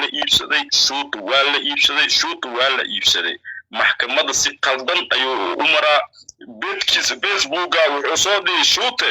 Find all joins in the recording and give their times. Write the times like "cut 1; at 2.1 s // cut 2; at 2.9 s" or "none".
none